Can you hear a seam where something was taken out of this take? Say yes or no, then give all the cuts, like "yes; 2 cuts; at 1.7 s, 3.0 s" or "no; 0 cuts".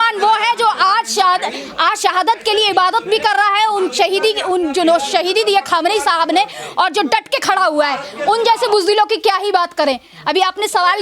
no; 0 cuts